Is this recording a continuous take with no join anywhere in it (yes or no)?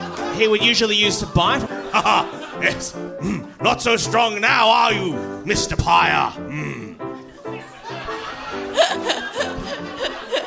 no